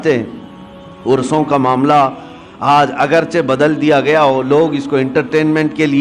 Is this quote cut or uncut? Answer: uncut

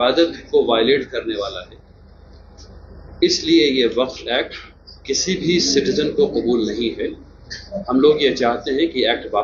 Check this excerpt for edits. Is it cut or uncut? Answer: uncut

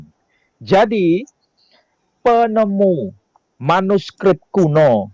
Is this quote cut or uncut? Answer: uncut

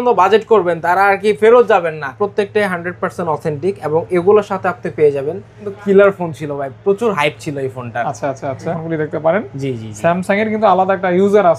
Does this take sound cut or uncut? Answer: cut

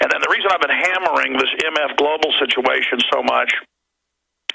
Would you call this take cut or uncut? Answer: uncut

